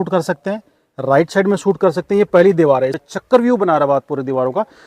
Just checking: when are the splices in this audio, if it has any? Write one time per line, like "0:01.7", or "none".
0:03.0